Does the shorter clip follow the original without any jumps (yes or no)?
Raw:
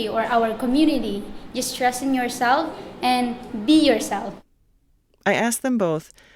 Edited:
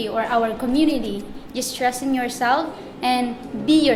yes